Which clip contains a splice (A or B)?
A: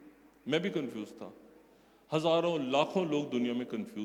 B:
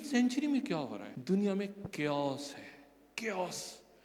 B